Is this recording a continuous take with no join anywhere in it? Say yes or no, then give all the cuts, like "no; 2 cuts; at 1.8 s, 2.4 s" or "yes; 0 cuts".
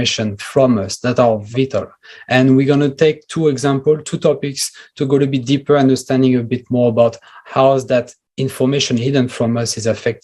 no; 1 cut; at 1.4 s